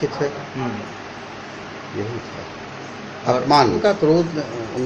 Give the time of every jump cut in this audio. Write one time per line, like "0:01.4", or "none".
0:03.8